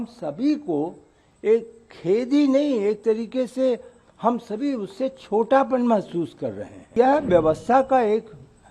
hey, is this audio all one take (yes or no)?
no